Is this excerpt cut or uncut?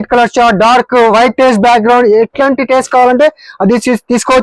uncut